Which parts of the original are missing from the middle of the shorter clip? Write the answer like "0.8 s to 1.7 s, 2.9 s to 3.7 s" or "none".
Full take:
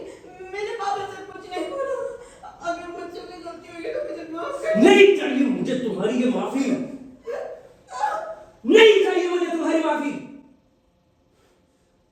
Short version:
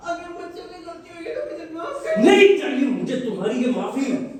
none

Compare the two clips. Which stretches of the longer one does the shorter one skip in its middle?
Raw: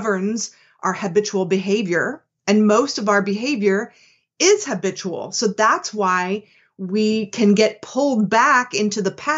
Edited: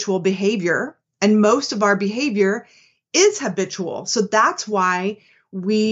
none

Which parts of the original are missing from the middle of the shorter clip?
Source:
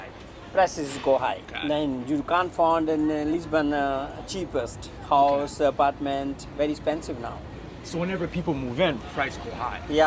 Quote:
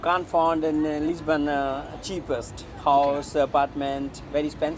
none

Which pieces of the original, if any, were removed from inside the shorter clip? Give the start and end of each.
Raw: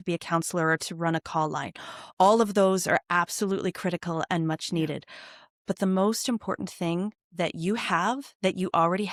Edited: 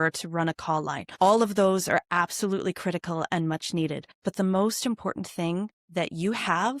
1.7 s to 2.0 s, 5.1 s to 5.5 s

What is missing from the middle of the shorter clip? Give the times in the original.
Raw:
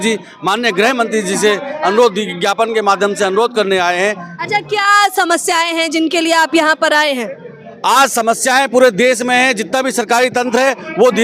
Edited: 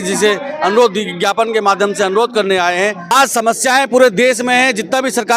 4.3 s to 7.9 s

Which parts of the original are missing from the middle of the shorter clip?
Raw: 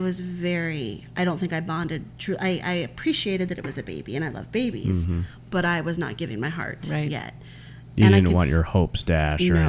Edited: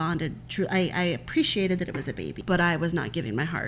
4.0 s to 5.4 s

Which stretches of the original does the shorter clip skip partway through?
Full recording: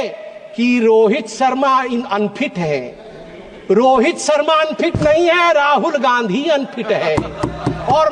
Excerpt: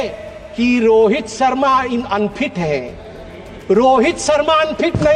none

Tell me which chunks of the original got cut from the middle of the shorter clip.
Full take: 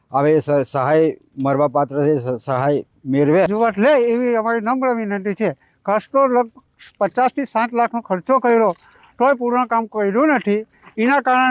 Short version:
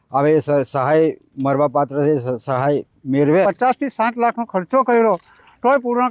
3.4 s to 7.0 s

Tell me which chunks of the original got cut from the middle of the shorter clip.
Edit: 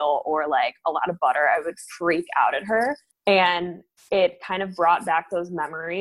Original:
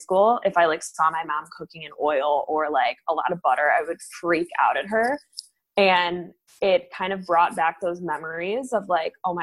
5.3 s to 5.6 s

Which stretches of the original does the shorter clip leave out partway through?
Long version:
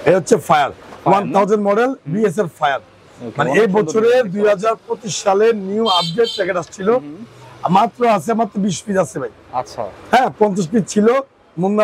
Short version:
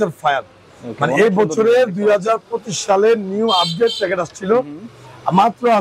none

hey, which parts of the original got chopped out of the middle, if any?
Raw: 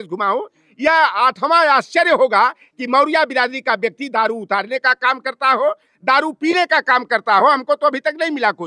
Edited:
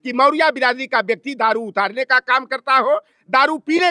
none

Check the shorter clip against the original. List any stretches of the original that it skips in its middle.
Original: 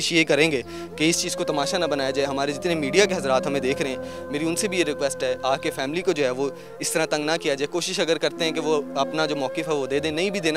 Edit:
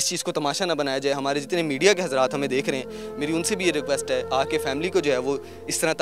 none

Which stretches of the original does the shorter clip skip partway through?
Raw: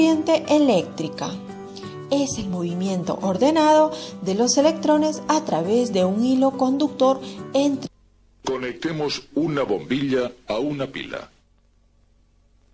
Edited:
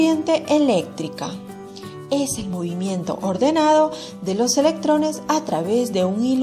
none

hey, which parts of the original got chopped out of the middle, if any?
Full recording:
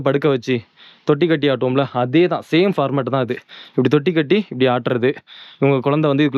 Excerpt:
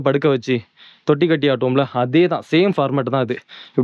none

